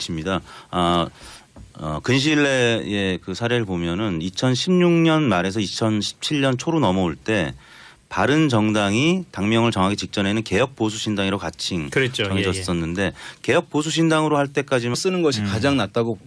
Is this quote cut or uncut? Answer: uncut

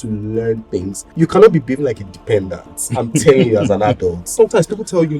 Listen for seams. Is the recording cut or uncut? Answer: cut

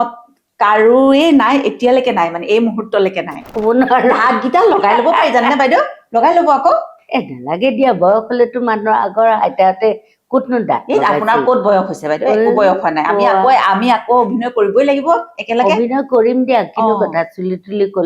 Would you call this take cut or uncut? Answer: cut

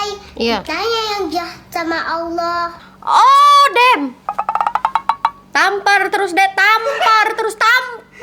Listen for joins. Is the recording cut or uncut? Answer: uncut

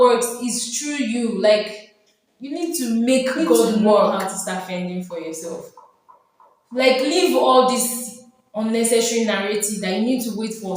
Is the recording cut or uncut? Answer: cut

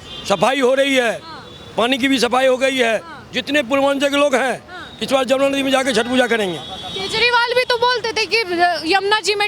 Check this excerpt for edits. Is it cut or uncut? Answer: uncut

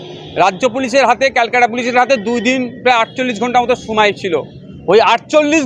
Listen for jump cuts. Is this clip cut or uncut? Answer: uncut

